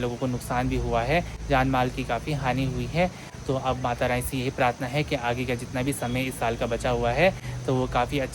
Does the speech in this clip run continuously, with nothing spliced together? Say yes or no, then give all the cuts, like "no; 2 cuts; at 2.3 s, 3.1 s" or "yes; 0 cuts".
yes; 0 cuts